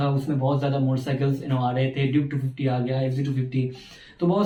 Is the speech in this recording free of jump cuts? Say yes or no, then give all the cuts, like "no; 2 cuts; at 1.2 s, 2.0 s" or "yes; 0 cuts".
yes; 0 cuts